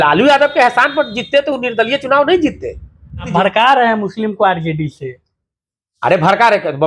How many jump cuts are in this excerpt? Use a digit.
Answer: 1